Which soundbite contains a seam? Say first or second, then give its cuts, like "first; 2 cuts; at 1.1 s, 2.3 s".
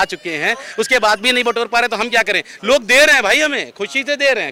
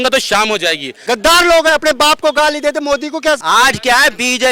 second; 2 cuts; at 1.0 s, 3.4 s